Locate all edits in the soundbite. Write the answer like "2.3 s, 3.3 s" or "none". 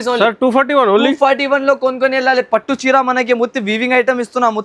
none